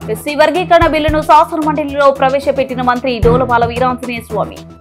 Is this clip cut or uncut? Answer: uncut